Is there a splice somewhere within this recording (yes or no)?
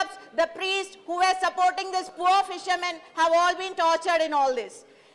yes